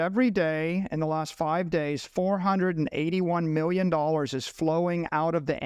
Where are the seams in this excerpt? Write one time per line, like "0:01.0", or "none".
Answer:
none